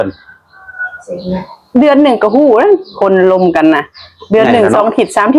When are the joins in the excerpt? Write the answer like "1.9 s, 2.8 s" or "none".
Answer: none